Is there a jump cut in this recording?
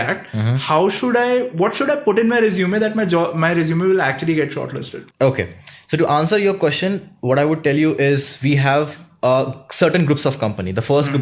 no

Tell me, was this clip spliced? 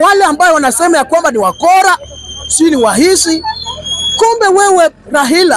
no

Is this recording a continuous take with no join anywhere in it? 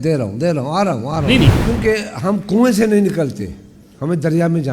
no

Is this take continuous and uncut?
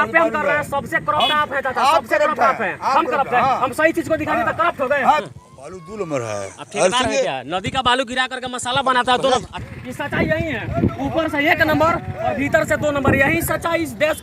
no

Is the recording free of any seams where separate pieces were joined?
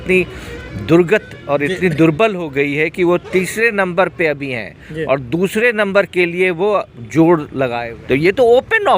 no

